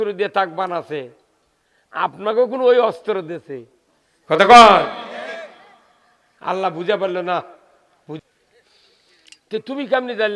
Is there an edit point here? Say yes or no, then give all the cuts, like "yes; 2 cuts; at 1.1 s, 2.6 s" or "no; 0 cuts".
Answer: yes; 1 cut; at 8.2 s